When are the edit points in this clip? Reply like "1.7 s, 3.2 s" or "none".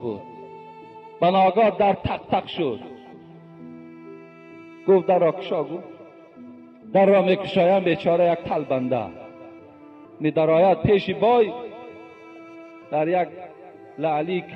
3.0 s, 4.6 s